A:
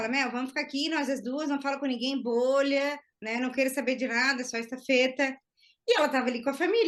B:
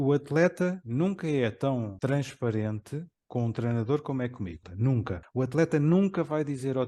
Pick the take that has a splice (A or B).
B